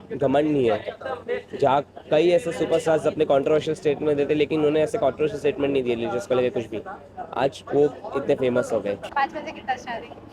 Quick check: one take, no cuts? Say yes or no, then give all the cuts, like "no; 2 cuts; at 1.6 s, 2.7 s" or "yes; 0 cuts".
no; 1 cut; at 9.1 s